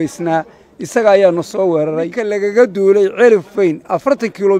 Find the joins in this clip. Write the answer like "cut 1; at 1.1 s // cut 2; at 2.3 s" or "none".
cut 1; at 2.2 s